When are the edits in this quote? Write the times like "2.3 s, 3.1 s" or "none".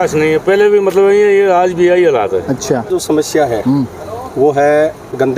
2.9 s